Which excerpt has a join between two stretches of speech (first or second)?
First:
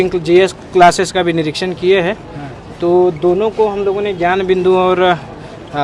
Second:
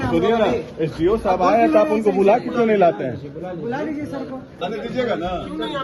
second